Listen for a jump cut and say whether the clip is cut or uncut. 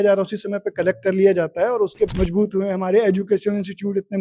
cut